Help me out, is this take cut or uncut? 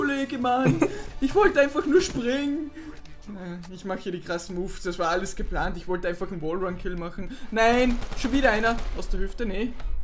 uncut